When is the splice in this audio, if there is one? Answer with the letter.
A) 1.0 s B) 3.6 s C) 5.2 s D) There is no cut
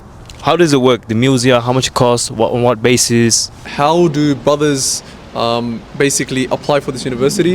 B